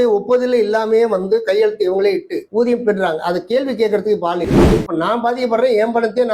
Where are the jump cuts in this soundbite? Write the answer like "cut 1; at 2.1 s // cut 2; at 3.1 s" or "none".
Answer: cut 1; at 4.7 s